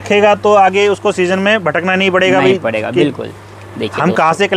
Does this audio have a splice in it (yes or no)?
no